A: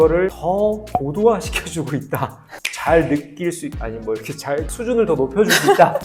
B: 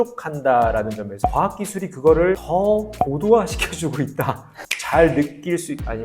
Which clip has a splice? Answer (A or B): B